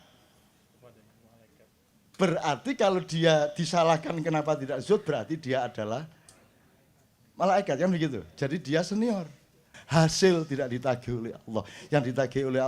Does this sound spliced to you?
yes; 1 cut; at 9.7 s

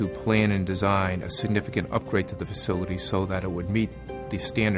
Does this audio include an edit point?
no; 0 cuts

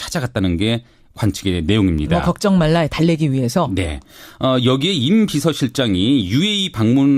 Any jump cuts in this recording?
yes; 1 cut; at 6.3 s

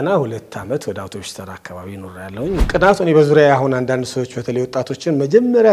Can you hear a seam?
yes; 1 cut; at 2.7 s

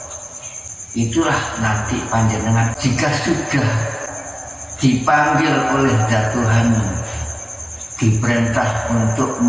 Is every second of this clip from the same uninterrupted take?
no; 1 cut; at 4.1 s

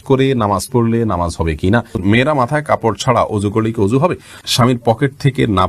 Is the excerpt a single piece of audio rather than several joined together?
no; 2 cuts; at 2.0 s, 4.4 s

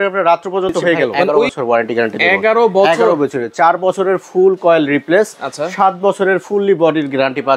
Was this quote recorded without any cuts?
no; 1 cut; at 1.5 s

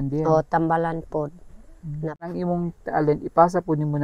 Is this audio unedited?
no; 1 cut; at 2.3 s

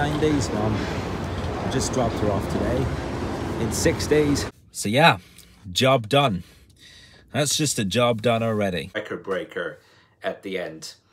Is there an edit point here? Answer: yes; 2 cuts; at 4.5 s, 8.9 s

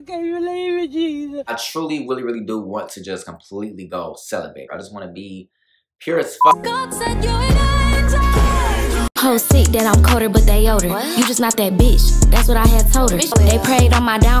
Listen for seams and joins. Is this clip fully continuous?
no; 4 cuts; at 1.5 s, 4.7 s, 6.6 s, 9.1 s

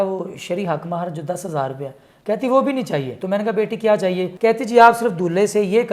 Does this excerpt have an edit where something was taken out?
yes; 2 cuts; at 3.1 s, 4.3 s

